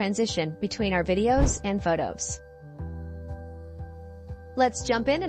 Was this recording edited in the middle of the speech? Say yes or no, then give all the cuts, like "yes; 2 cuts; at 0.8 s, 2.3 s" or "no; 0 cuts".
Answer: yes; 2 cuts; at 2.2 s, 4.5 s